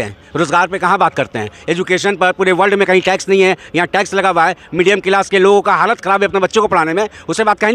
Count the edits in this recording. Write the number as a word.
zero